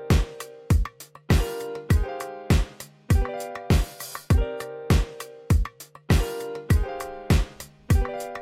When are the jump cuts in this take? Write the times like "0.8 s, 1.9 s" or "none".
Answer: 4.7 s